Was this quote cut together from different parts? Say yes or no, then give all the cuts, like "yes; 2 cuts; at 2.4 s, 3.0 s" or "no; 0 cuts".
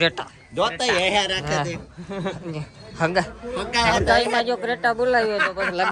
no; 0 cuts